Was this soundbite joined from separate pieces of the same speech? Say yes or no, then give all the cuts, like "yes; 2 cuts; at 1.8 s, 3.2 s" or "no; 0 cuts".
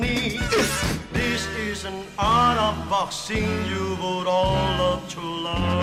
no; 0 cuts